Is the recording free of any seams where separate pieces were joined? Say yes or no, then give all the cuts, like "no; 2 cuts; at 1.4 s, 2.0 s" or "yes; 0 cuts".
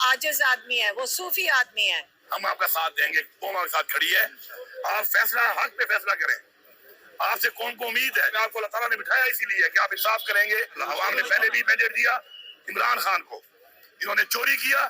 no; 3 cuts; at 2.1 s, 8.3 s, 10.8 s